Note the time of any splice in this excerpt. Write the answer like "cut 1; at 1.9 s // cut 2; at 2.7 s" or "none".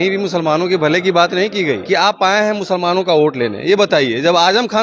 cut 1; at 1.8 s